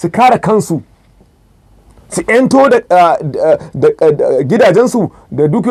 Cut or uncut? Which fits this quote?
uncut